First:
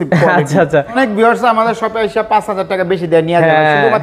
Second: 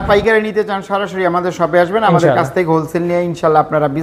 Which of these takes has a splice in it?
first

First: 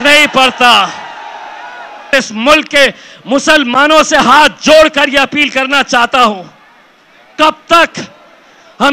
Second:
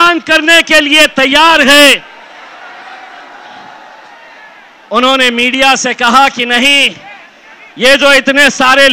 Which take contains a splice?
first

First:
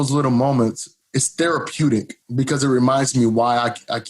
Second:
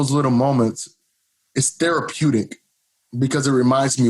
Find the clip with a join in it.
first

